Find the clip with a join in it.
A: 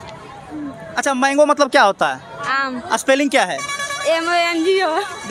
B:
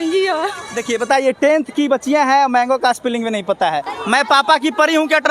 B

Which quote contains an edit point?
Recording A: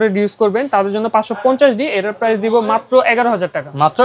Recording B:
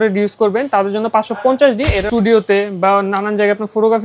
B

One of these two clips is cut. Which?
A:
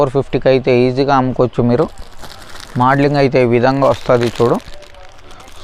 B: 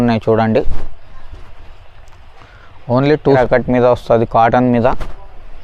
B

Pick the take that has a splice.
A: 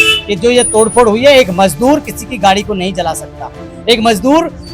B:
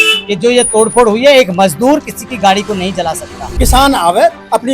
B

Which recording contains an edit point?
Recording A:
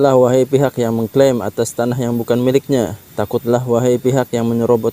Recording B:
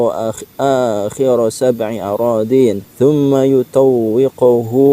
B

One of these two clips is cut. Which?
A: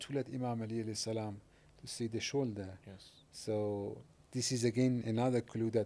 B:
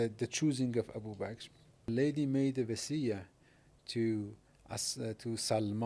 B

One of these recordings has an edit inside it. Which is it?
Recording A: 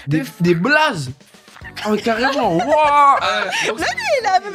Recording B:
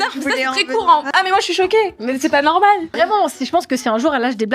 B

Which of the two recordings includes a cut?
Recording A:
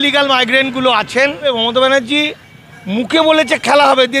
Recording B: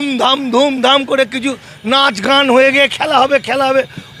A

